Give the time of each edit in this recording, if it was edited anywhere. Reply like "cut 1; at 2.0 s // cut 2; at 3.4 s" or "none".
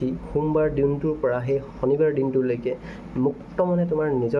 none